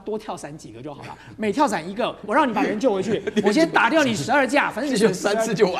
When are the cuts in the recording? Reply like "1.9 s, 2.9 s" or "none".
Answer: 2.2 s